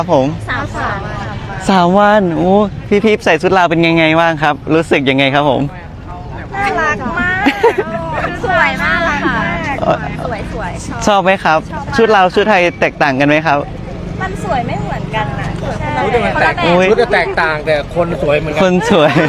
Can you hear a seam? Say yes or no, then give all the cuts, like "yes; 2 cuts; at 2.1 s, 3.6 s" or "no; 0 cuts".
no; 0 cuts